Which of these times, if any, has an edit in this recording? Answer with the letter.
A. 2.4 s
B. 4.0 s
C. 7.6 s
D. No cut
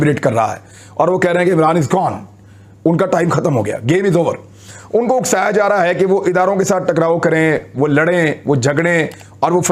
D